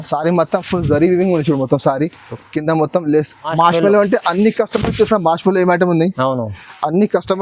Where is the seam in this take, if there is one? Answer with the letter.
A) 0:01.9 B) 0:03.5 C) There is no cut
B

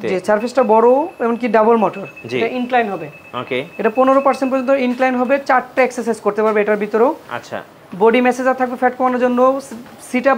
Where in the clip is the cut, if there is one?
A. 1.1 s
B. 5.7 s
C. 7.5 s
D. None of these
D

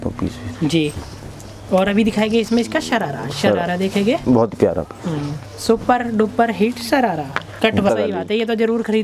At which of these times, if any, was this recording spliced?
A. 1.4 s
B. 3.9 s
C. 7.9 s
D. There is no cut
C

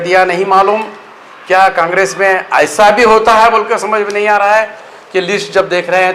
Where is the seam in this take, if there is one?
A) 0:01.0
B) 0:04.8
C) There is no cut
C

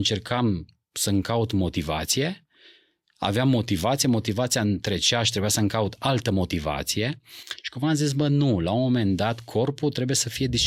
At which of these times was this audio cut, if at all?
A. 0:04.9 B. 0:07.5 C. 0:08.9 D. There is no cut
D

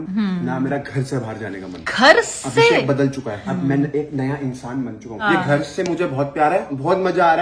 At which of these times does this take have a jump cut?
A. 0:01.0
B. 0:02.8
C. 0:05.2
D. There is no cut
C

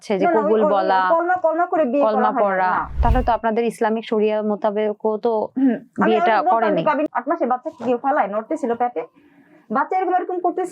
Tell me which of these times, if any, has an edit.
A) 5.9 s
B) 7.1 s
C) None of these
B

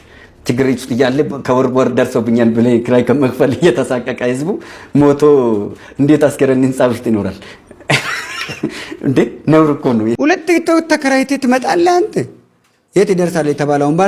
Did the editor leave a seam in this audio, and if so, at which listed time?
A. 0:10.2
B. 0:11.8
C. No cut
A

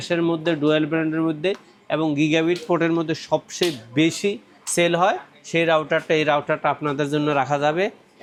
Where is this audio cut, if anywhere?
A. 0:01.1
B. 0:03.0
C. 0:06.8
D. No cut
D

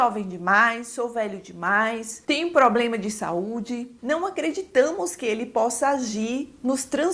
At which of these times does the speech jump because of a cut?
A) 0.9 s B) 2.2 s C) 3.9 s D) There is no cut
C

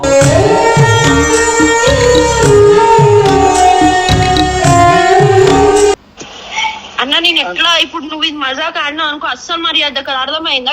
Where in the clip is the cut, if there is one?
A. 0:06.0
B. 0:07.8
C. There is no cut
A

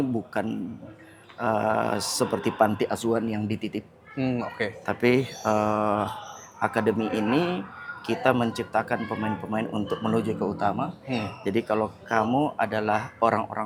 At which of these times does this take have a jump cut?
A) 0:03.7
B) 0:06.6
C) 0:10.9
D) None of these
D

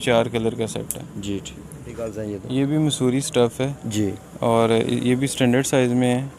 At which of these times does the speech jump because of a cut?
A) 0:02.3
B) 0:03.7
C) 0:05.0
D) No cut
A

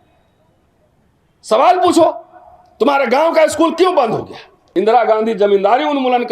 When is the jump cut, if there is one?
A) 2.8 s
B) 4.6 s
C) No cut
B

